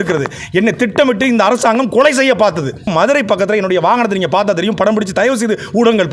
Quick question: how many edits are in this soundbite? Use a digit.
1